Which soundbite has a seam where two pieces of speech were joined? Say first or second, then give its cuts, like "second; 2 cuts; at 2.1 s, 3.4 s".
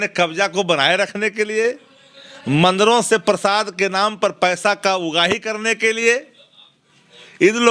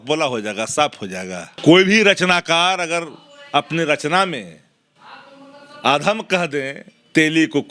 second; 1 cut; at 1.5 s